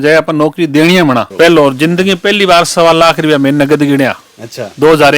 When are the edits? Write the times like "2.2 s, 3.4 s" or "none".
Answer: 1.3 s